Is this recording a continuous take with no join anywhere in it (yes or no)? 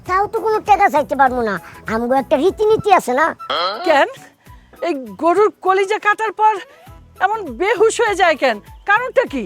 no